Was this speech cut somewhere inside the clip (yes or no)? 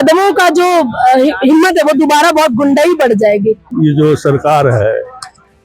yes